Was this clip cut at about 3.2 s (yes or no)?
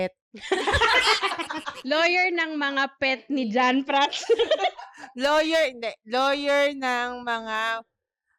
no